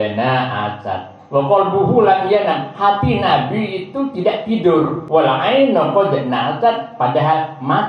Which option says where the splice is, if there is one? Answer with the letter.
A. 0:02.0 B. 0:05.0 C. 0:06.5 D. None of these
B